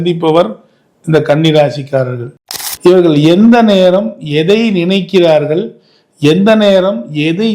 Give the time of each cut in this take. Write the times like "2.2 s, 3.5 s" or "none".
2.2 s